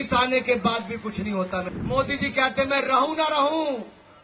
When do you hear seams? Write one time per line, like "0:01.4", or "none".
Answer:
0:01.7

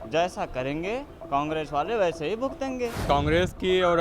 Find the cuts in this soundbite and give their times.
0:03.0

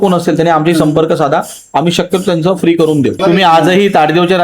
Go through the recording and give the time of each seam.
0:03.2

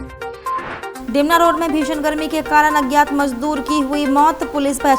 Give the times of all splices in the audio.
0:00.9

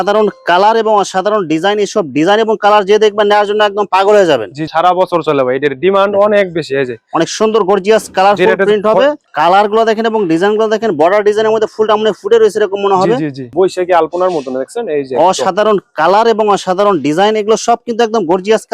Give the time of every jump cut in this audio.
0:04.7
0:09.2
0:13.5

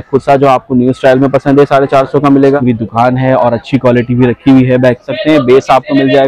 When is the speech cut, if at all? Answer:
0:02.6
0:05.1

